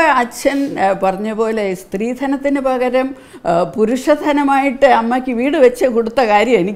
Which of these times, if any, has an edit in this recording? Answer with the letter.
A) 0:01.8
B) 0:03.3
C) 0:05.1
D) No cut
D